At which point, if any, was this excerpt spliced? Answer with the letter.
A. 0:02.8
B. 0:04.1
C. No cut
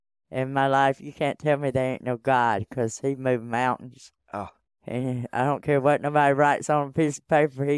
C